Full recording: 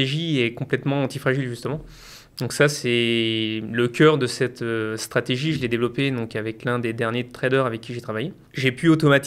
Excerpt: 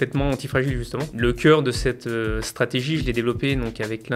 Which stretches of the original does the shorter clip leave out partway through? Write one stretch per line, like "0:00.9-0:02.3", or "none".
0:01.8-0:03.7

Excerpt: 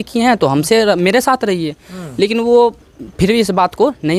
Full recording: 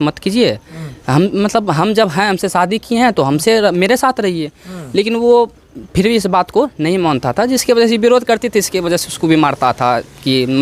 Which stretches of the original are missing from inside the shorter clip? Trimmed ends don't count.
none

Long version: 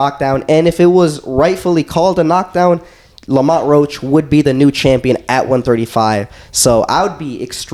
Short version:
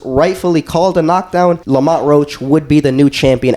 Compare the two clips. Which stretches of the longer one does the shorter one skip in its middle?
0:02.8-0:03.2

